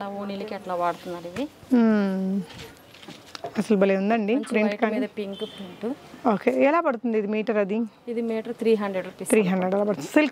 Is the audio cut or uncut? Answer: uncut